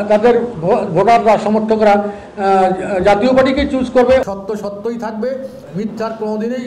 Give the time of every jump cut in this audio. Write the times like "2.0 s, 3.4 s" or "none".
4.2 s

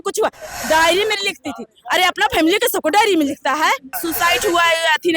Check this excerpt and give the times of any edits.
4.0 s

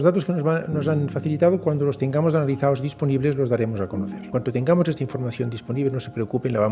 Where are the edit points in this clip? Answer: 4.3 s

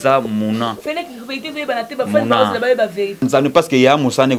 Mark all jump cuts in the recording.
3.2 s

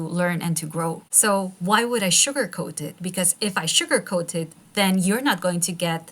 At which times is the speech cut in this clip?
1.1 s

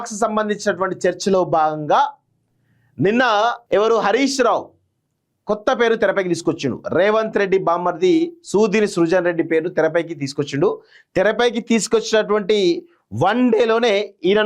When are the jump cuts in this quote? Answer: 3.6 s

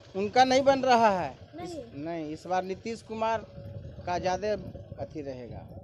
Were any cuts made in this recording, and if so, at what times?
none

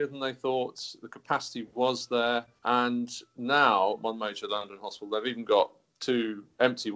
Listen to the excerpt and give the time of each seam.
4.0 s

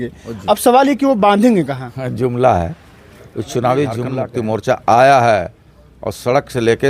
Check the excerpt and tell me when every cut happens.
4.2 s

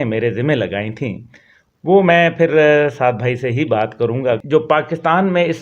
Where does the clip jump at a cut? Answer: 4.4 s

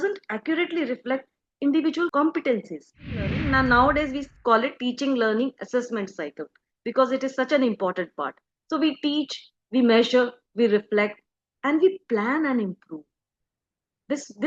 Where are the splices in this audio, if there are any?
2.1 s, 3.4 s

